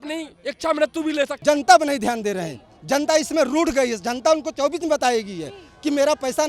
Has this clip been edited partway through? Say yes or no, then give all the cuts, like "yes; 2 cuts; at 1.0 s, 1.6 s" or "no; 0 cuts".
yes; 1 cut; at 1.4 s